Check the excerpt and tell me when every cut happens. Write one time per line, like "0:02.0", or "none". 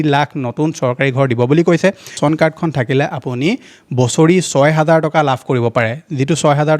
0:02.1